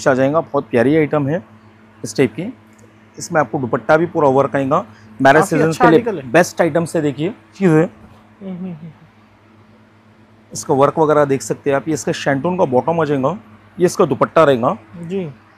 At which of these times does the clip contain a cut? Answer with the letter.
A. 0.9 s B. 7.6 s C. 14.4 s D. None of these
B